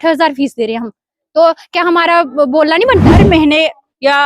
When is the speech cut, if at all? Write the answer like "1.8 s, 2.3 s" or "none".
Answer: 3.1 s